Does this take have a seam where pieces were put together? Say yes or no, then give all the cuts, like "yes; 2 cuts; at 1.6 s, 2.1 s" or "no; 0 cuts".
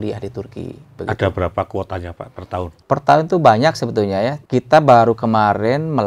yes; 3 cuts; at 0.9 s, 2.8 s, 4.4 s